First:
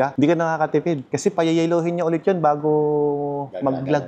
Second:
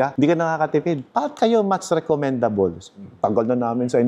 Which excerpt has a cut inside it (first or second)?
second